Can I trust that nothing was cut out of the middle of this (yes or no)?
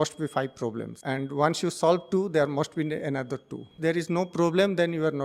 no